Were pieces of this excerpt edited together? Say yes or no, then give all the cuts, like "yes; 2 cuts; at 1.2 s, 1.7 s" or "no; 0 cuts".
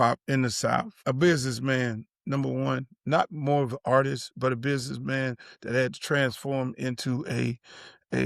yes; 1 cut; at 1.0 s